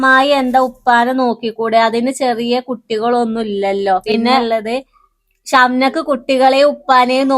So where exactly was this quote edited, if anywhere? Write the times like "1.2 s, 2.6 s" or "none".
4.4 s

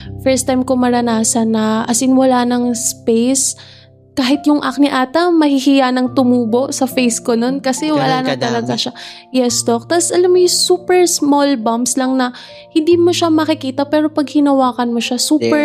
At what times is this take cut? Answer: none

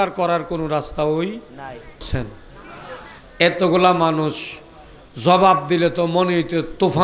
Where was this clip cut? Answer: 2.1 s

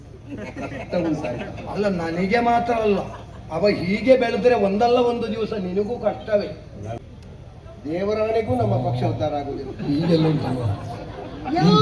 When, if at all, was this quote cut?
7.0 s

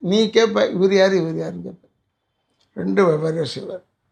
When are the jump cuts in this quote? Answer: none

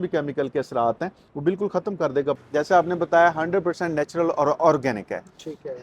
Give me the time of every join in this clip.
2.4 s

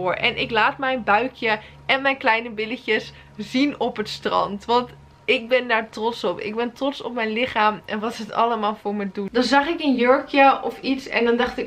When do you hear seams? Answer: 9.3 s

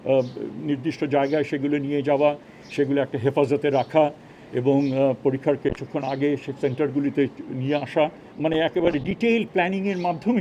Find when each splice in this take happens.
none

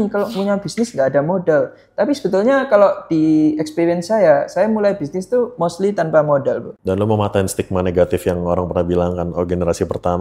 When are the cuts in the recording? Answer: 6.7 s

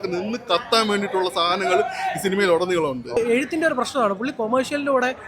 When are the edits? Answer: 3.2 s

